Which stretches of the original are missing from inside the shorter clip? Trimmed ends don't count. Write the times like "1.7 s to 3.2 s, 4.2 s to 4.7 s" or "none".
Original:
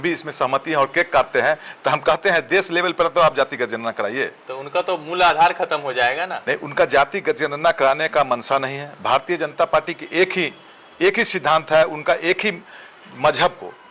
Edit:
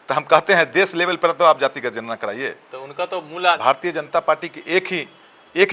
5.3 s to 9.0 s